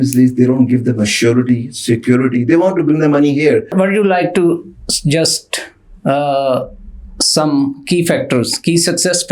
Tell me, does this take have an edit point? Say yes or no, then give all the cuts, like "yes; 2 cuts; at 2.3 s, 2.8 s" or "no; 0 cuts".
yes; 1 cut; at 3.7 s